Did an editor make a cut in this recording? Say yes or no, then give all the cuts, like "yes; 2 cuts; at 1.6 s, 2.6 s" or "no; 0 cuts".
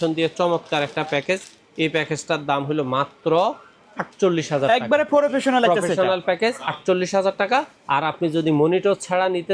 no; 0 cuts